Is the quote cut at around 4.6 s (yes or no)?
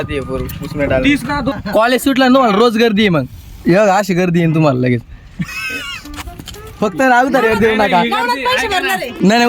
no